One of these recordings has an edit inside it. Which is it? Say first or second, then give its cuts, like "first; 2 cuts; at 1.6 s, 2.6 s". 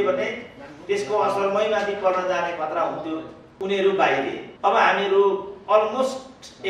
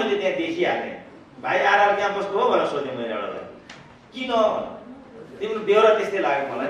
first; 2 cuts; at 3.4 s, 4.4 s